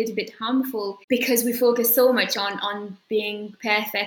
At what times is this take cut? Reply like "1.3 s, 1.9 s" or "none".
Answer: 1.0 s